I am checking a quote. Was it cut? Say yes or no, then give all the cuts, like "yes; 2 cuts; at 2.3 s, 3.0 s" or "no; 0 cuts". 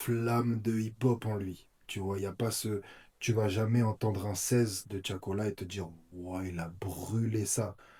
no; 0 cuts